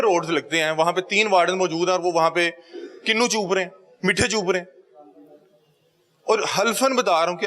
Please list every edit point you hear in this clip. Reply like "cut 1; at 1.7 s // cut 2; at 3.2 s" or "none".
none